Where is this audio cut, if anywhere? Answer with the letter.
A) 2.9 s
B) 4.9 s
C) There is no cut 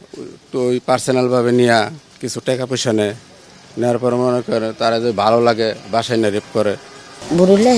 C